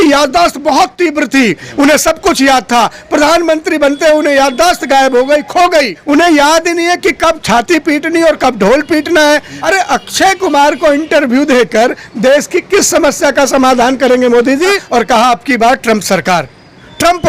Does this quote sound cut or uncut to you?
cut